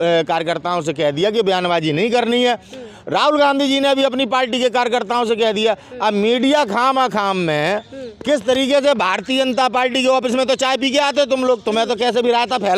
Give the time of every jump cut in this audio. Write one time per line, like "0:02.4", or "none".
none